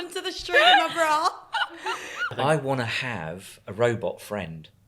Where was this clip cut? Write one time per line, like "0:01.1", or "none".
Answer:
0:02.3

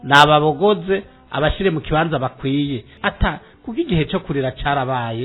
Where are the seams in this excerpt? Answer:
0:02.9

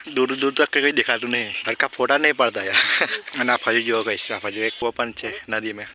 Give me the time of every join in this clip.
0:01.6
0:03.2
0:04.8

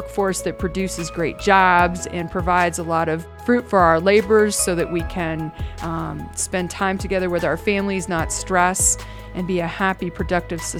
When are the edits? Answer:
0:03.2

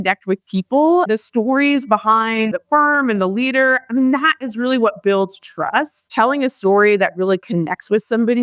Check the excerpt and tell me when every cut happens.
0:01.1
0:02.6
0:06.1

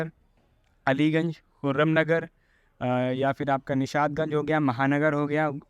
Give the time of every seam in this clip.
none

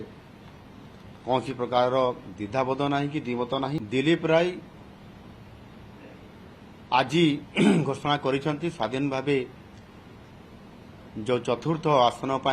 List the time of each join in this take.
0:03.8

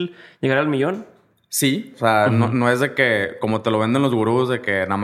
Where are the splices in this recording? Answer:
0:01.9

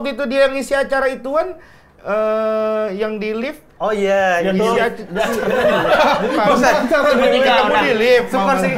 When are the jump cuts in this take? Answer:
none

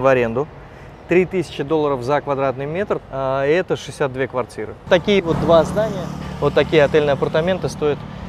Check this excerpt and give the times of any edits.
0:03.0
0:04.9

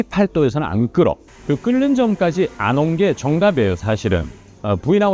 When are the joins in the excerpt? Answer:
0:01.2

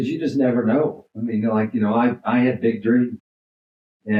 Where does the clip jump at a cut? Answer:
none

